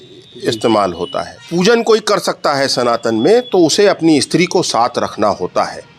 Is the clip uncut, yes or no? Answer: no